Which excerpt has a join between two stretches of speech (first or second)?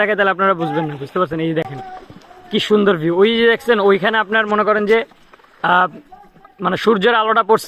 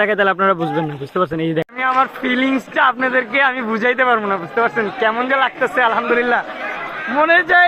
second